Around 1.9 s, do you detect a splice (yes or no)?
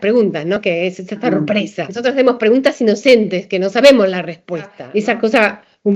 yes